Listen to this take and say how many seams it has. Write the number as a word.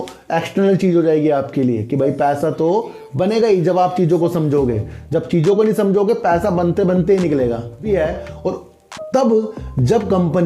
one